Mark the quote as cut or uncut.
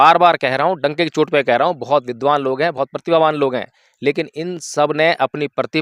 uncut